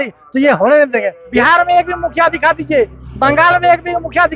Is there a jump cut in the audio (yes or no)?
yes